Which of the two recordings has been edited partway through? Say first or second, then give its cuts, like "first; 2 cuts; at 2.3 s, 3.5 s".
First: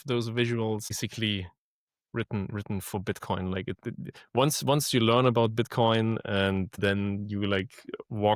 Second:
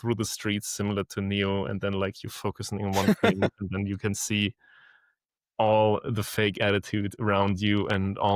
first; 2 cuts; at 1.0 s, 6.8 s